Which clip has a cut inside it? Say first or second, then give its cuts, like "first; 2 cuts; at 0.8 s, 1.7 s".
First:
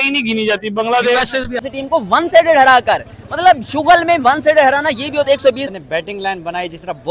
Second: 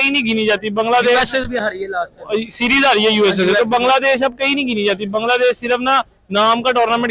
first; 2 cuts; at 1.7 s, 5.7 s